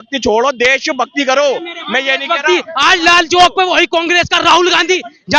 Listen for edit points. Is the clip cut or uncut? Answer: uncut